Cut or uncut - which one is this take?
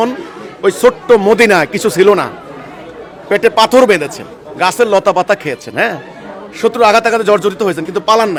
uncut